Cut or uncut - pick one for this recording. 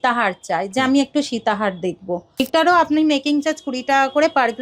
cut